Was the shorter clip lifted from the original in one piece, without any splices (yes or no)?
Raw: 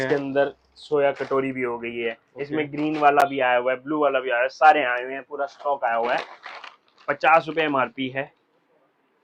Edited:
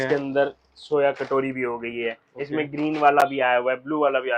yes